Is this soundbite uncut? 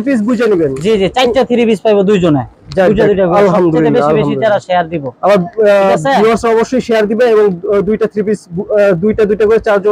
yes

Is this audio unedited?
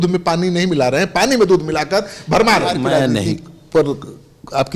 no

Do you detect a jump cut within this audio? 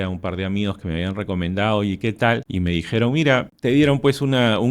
yes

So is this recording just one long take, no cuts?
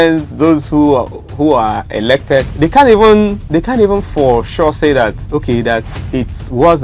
no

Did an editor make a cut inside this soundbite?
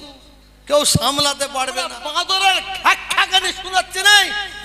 yes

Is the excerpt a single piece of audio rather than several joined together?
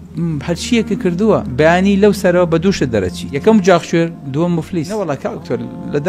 no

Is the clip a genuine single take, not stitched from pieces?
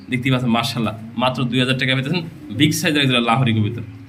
yes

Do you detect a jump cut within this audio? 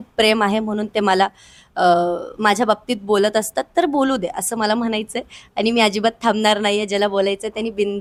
no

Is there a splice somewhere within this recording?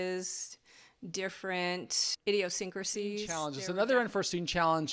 yes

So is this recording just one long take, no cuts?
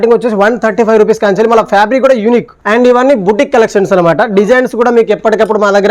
no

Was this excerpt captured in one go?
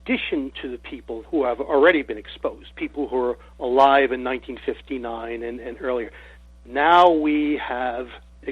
no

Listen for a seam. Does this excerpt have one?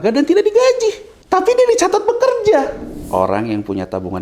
yes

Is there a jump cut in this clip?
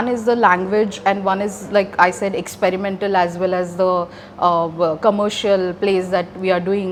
no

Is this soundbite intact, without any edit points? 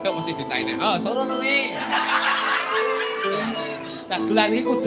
yes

